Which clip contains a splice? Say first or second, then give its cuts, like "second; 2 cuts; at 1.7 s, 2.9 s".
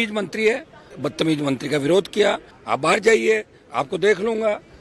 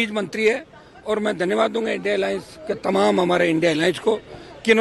first; 2 cuts; at 0.9 s, 2.5 s